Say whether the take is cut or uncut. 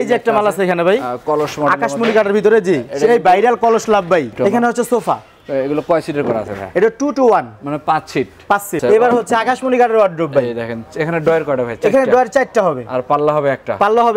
cut